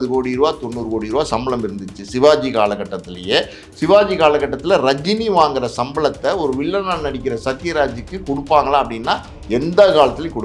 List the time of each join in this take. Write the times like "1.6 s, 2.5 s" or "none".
none